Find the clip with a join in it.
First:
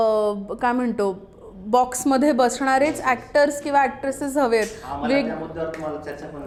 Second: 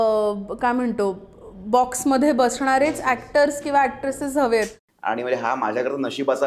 second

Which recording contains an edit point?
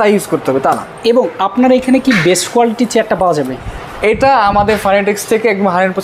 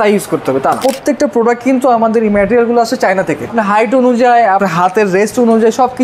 second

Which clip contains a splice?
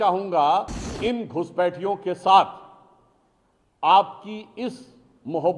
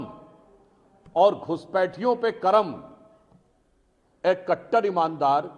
first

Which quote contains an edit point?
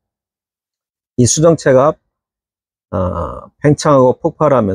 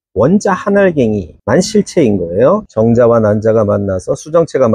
second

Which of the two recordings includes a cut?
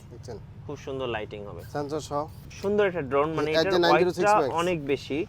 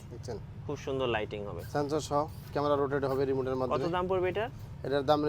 first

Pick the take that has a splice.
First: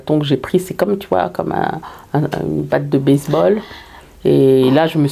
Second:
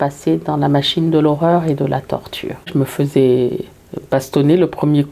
second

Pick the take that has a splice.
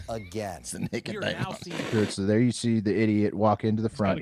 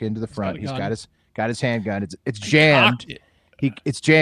first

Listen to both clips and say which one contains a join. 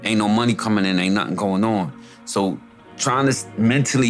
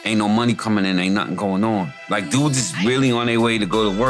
second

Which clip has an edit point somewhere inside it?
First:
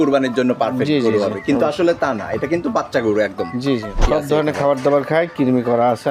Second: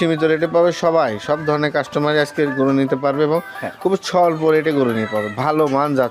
first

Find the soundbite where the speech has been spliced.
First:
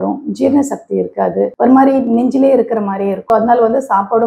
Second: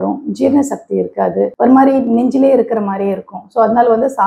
first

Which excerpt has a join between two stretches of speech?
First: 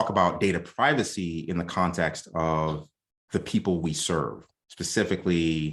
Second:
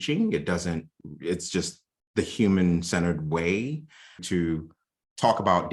second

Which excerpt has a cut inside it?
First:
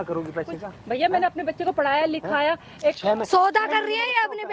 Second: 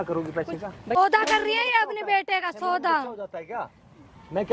second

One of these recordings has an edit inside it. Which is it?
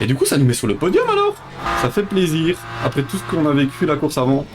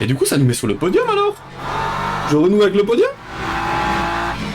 first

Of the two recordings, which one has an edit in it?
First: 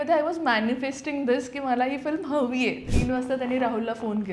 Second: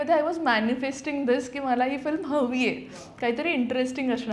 first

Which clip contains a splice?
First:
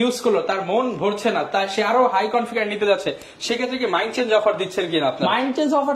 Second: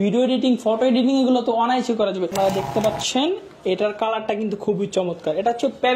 second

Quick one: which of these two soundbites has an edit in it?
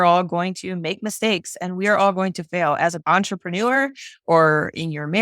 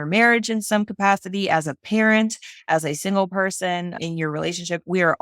first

